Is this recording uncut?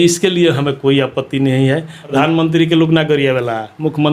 no; 1 cut; at 2.2 s

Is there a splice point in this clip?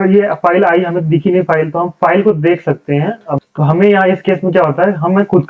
yes; 1 cut; at 3.2 s

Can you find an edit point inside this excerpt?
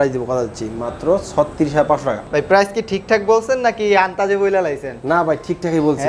yes; 1 cut; at 2.2 s

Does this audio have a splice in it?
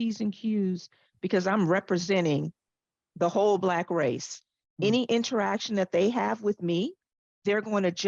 no; 0 cuts

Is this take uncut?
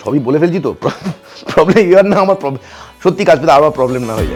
yes; 0 cuts

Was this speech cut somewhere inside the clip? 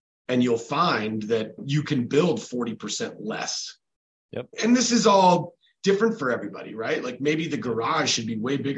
yes; 1 cut; at 4.5 s

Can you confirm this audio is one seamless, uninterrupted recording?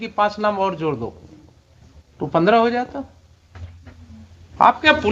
no; 1 cut; at 4.0 s

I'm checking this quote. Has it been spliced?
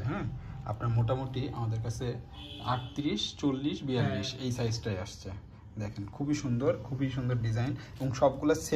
no; 0 cuts

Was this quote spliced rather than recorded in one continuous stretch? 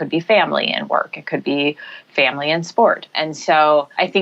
no; 0 cuts

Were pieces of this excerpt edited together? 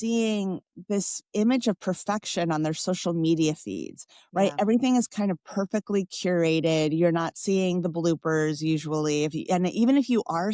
no; 0 cuts

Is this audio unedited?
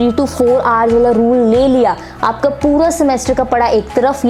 yes; 0 cuts

